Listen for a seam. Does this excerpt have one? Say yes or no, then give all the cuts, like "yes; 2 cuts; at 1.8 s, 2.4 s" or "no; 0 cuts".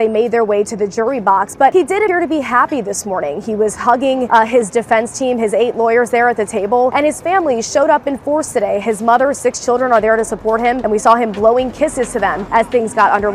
yes; 5 cuts; at 2.0 s, 4.3 s, 6.9 s, 10.8 s, 12.4 s